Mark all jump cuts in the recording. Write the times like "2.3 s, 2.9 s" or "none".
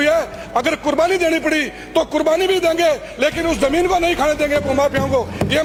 none